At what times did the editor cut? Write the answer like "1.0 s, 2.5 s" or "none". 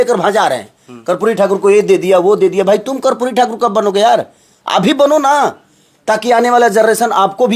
none